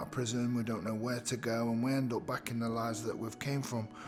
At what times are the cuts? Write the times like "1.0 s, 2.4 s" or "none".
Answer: none